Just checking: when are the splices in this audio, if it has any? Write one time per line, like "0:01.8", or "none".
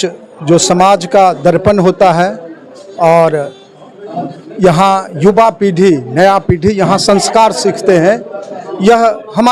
none